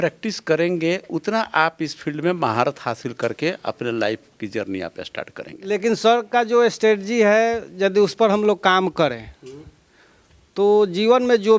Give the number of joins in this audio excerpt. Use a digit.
1